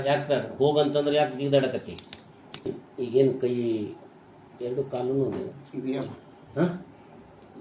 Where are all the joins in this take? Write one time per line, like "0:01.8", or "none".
0:02.8

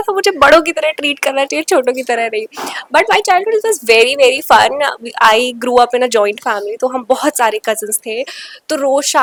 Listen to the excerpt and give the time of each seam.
none

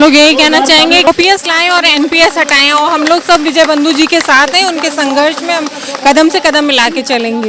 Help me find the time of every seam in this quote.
0:01.1

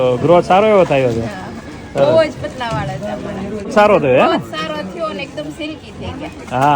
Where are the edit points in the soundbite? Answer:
0:03.7

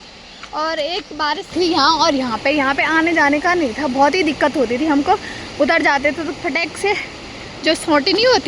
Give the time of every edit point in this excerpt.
0:01.5

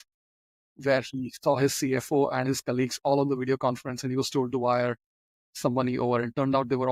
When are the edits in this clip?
none

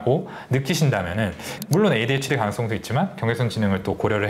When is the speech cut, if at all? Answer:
0:01.6

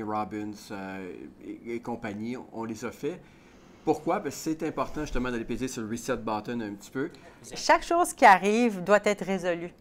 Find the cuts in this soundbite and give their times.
0:07.5

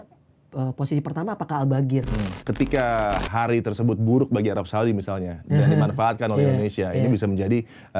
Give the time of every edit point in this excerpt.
0:02.3

